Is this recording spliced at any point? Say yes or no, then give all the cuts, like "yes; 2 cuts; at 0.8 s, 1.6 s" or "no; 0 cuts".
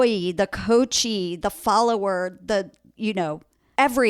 yes; 1 cut; at 3.2 s